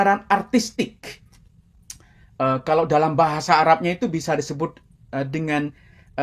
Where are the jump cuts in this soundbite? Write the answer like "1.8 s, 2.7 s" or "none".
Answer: none